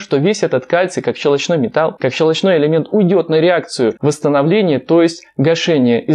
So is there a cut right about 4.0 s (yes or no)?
yes